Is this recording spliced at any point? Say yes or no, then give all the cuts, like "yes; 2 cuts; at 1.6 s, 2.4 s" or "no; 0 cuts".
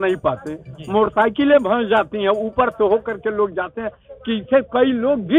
no; 0 cuts